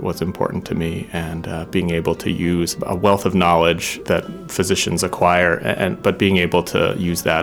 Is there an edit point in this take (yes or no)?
yes